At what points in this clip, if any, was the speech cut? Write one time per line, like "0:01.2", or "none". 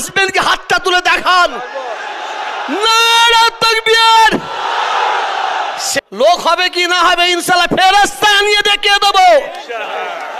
0:05.8